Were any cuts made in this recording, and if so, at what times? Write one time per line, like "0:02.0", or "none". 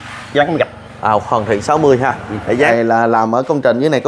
0:02.7